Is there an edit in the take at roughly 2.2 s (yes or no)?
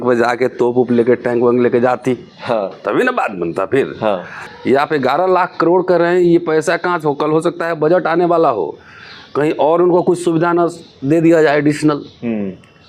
no